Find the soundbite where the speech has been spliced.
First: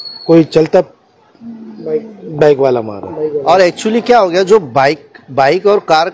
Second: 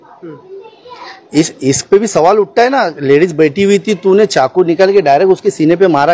first; 1 cut; at 3.4 s

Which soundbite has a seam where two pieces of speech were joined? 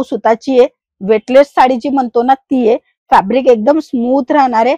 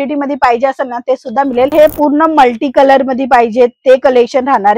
second; 1 cut; at 1.7 s

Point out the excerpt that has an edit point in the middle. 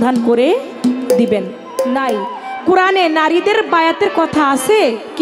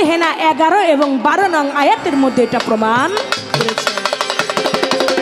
first; 1 cut; at 1.8 s

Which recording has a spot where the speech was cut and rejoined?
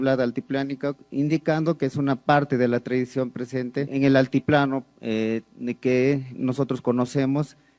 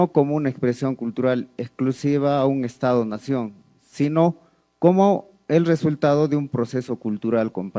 first; 2 cuts; at 1.0 s, 3.9 s

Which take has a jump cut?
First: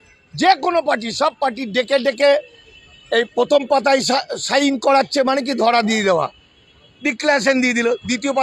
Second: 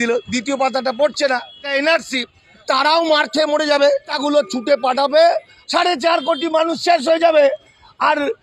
second; 4 cuts; at 1.7 s, 2.6 s, 4.1 s, 5.5 s

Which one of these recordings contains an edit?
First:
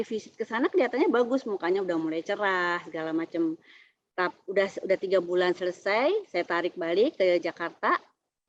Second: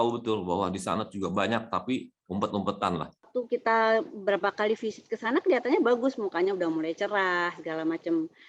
second; 1 cut; at 3.3 s

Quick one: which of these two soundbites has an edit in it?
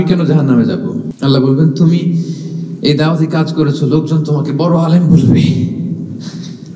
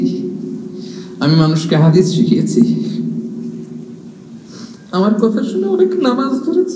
first; 1 cut; at 1.1 s

